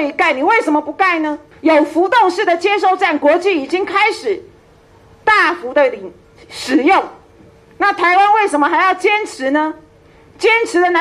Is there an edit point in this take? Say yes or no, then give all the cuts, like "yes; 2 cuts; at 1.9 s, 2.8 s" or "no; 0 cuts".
yes; 1 cut; at 1.4 s